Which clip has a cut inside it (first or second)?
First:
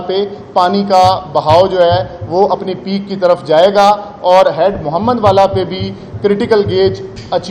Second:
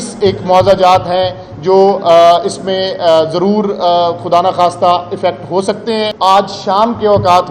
second